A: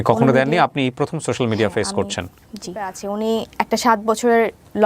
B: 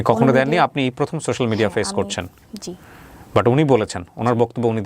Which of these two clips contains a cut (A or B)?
A